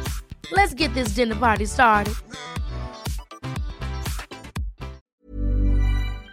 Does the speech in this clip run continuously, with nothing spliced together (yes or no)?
no